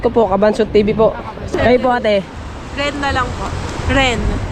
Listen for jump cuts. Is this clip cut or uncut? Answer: cut